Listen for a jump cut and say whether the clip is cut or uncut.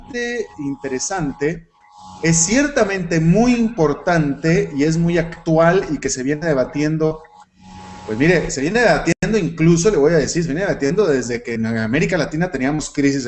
cut